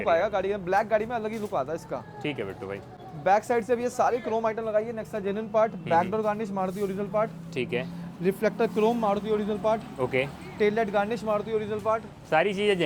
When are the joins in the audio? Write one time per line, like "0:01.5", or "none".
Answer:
none